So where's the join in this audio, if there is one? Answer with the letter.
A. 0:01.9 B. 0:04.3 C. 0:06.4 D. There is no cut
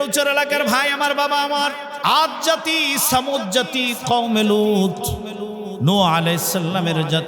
A